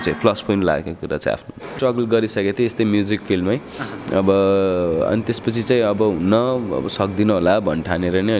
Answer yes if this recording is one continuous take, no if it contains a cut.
no